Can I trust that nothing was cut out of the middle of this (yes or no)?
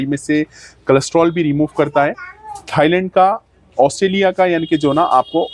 yes